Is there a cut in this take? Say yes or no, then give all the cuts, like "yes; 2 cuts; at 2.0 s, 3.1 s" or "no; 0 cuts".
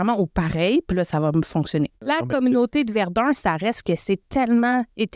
yes; 1 cut; at 2.0 s